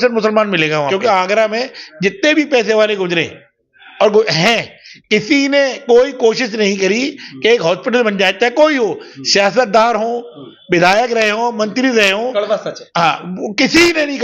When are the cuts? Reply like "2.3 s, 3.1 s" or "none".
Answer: 1.4 s